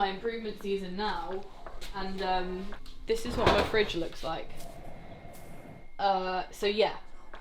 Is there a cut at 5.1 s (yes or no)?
no